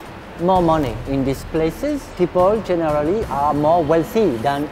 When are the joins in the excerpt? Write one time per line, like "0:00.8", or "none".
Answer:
0:01.0
0:02.1